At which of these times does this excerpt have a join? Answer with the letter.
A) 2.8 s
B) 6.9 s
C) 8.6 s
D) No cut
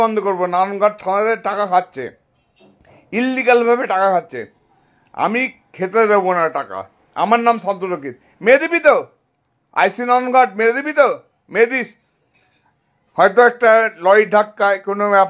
D